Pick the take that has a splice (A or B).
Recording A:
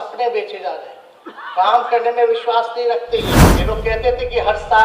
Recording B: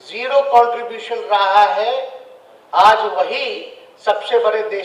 A